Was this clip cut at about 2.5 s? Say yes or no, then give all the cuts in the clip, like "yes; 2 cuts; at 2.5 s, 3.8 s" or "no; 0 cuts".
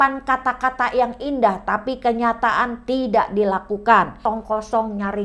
no; 1 cut; at 4.1 s